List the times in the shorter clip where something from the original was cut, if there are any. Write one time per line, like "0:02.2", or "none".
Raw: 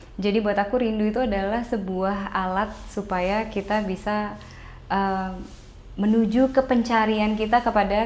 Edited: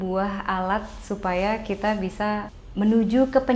0:02.6